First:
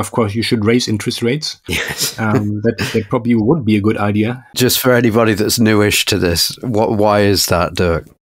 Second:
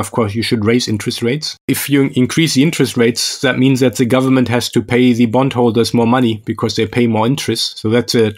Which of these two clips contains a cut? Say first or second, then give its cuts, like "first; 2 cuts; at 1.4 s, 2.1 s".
second; 1 cut; at 1.7 s